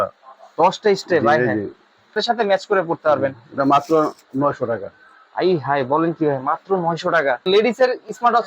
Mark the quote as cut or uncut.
cut